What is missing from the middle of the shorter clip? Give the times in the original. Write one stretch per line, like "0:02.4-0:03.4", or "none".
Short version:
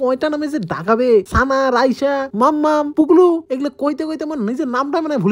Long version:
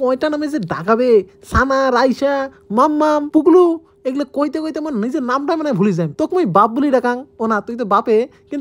0:01.3-0:01.5
0:02.5-0:02.6
0:03.8-0:04.0